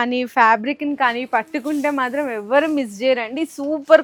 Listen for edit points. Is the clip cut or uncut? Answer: uncut